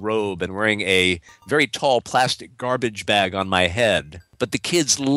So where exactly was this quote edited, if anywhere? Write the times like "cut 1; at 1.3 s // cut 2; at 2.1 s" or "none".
cut 1; at 4.3 s

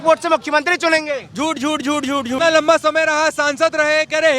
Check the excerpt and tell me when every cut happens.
cut 1; at 2.4 s

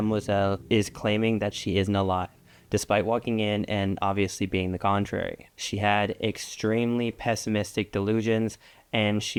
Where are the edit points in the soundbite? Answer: none

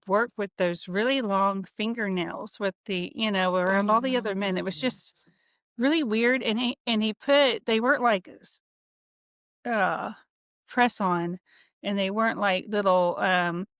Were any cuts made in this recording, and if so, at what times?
none

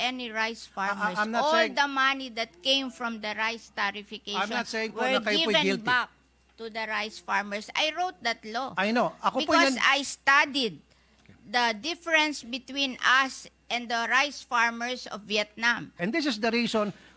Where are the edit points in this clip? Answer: cut 1; at 16.0 s

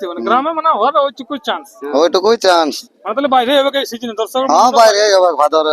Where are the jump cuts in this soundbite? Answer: cut 1; at 2.9 s

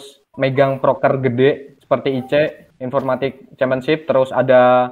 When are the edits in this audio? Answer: cut 1; at 1.7 s

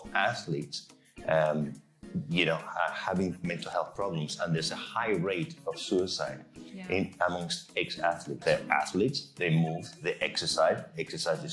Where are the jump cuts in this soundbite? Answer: cut 1; at 8.3 s

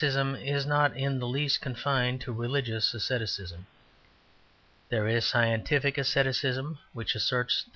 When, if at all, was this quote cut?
none

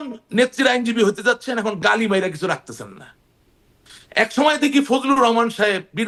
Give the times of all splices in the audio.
none

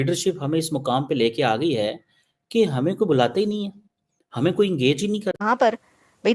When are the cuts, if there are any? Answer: cut 1; at 5.4 s

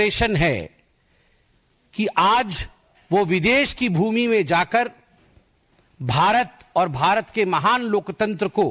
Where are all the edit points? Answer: cut 1; at 7.3 s

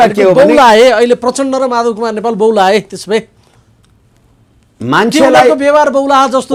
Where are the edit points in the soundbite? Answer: none

